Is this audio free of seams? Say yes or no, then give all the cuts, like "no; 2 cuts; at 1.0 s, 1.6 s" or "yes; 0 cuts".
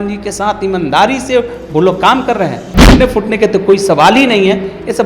no; 1 cut; at 2.8 s